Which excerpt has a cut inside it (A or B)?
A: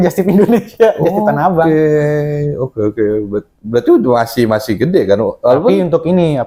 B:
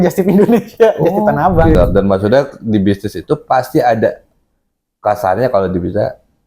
B